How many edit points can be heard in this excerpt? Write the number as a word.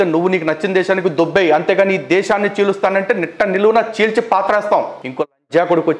one